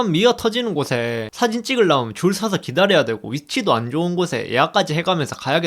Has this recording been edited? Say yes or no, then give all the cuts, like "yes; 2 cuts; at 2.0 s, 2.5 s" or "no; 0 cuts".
yes; 1 cut; at 1.3 s